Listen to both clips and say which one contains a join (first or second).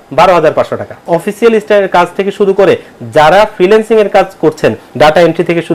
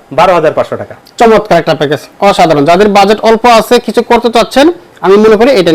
first